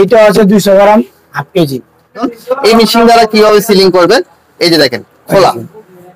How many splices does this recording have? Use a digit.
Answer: 1